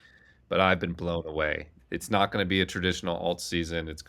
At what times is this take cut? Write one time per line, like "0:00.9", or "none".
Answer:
0:01.6